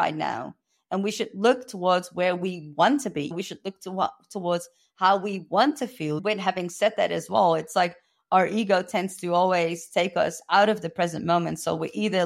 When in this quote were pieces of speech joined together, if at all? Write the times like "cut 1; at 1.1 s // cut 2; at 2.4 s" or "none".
cut 1; at 3.3 s // cut 2; at 6.2 s